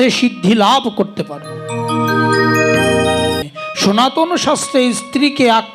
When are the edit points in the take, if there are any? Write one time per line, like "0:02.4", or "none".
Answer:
0:03.4